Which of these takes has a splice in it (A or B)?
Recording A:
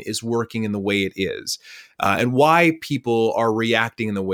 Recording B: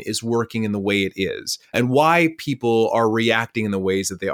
B